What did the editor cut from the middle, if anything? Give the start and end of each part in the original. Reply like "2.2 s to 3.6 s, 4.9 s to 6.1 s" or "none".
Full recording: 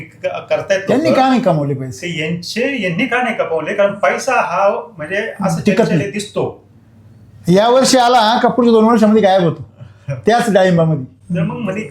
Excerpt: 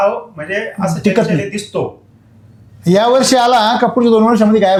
none